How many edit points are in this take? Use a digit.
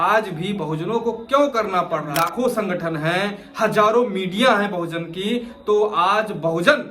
1